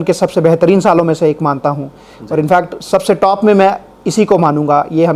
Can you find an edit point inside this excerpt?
no; 0 cuts

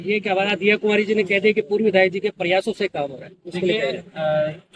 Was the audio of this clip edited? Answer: no; 0 cuts

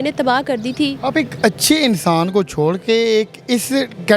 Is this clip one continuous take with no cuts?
yes; 0 cuts

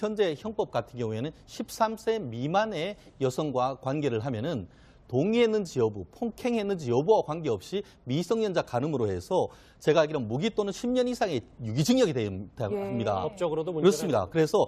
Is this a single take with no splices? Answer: no; 1 cut; at 6.8 s

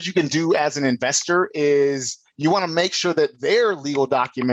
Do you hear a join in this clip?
no; 0 cuts

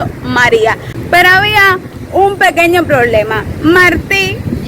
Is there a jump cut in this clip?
yes; 1 cut; at 0.9 s

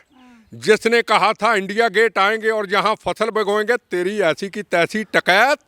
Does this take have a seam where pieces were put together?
no; 0 cuts

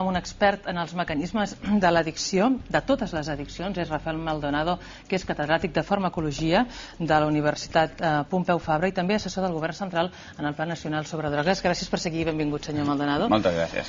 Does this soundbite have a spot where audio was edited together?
no; 0 cuts

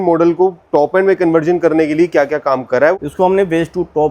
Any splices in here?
yes; 1 cut; at 2.9 s

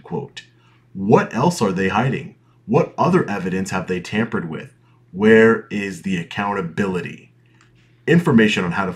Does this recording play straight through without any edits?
yes; 0 cuts

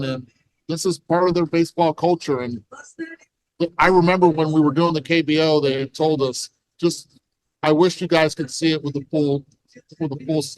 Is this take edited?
no; 0 cuts

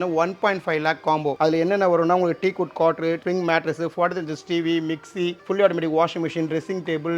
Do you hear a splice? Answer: no; 0 cuts

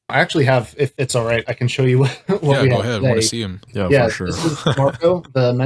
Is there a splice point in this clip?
yes; 1 cut; at 1.0 s

